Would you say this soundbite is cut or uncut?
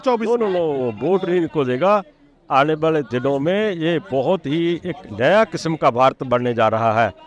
uncut